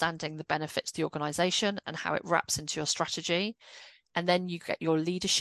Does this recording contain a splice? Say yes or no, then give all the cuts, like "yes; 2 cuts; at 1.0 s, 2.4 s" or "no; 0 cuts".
no; 0 cuts